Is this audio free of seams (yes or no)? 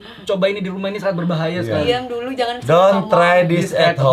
yes